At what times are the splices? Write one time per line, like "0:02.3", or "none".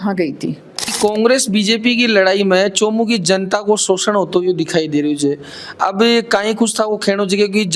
0:00.9